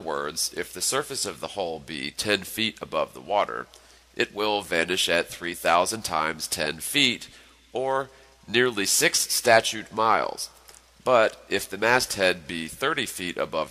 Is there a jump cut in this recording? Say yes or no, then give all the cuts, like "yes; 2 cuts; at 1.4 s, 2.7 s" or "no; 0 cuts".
yes; 1 cut; at 6.5 s